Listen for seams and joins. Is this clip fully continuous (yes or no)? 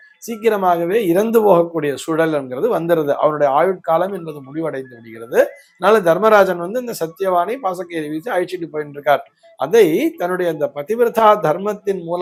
yes